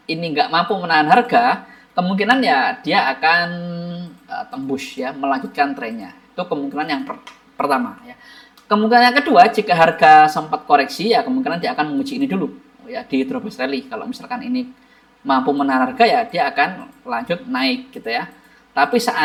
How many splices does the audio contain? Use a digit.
0